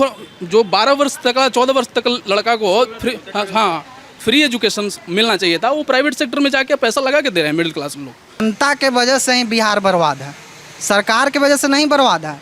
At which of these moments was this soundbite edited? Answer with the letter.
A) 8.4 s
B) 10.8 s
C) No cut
A